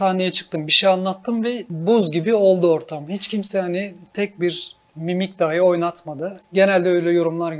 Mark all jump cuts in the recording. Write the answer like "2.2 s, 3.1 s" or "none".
1.7 s